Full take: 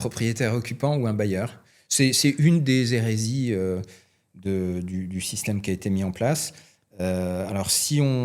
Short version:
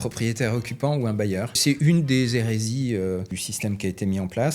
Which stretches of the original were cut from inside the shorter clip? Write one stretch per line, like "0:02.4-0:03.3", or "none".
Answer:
0:01.6-0:02.2
0:04.0-0:05.3